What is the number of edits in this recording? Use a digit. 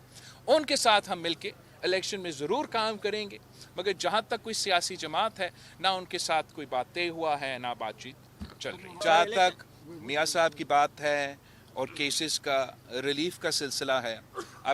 1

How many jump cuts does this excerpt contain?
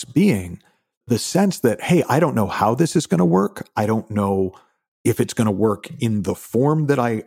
1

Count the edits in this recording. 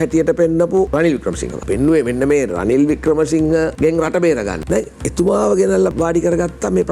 4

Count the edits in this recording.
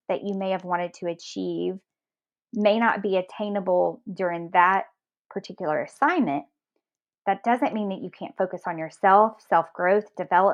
0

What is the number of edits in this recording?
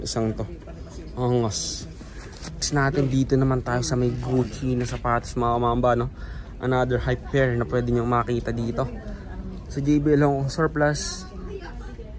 1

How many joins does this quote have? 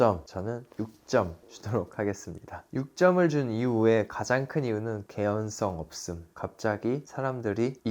1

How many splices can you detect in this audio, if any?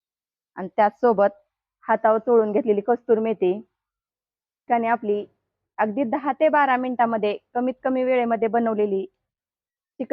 1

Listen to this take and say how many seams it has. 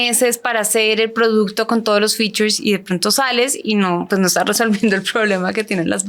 0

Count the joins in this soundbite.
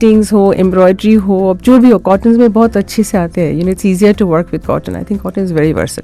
0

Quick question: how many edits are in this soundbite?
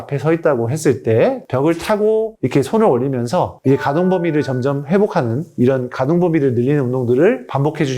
2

